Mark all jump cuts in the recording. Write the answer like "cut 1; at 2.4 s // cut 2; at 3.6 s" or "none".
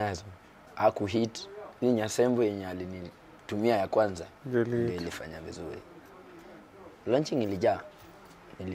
none